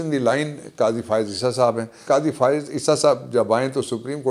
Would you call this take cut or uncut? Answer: cut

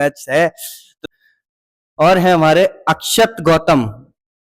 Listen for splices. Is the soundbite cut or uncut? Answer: cut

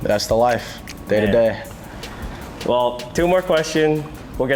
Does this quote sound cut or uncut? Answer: uncut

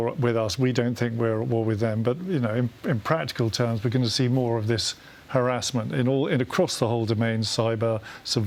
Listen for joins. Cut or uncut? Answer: uncut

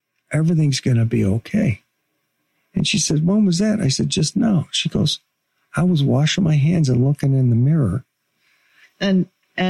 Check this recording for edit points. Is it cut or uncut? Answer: uncut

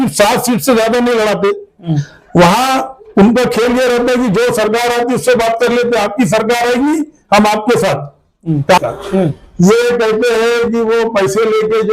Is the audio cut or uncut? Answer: cut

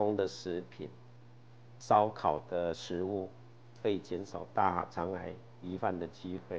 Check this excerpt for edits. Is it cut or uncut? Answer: uncut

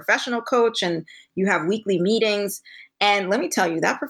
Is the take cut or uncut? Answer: uncut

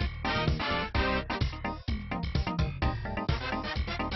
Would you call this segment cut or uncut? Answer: cut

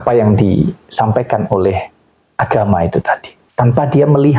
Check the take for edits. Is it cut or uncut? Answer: cut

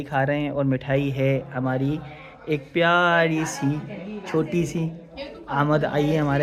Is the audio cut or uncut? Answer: uncut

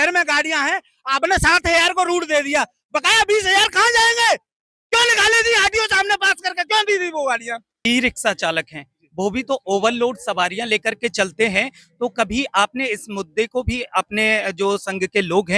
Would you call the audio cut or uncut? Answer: cut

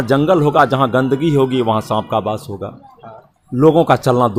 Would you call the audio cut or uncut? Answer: uncut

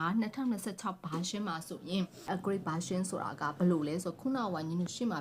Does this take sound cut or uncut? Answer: cut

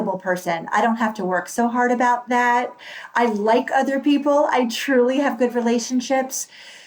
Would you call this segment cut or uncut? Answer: uncut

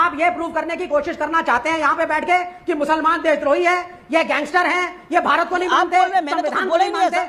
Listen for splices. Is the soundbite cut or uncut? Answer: uncut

